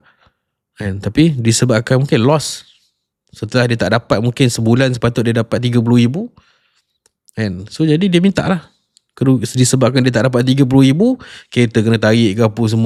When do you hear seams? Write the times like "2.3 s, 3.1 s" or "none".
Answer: none